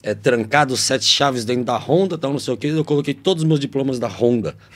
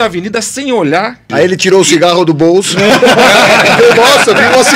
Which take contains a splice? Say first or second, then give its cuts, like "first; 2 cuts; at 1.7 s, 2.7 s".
second; 1 cut; at 1.3 s